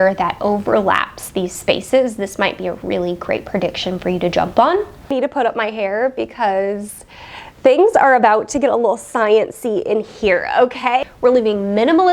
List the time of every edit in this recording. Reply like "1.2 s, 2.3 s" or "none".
5.1 s, 11.0 s